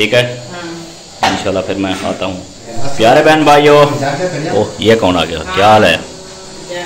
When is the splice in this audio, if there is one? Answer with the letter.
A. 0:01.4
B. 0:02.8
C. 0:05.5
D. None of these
B